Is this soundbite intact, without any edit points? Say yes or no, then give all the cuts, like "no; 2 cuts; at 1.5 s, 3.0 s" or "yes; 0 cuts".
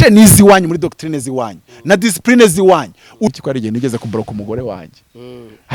no; 1 cut; at 3.3 s